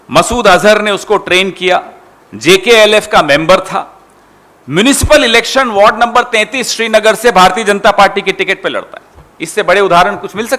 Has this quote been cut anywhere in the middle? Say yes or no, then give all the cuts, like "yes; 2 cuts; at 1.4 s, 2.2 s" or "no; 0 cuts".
no; 0 cuts